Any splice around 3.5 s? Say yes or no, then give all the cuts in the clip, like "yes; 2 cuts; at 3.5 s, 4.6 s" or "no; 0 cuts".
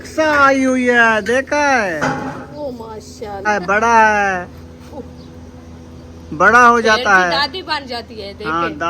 yes; 1 cut; at 3.5 s